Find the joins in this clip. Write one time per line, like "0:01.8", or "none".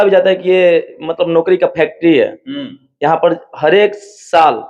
none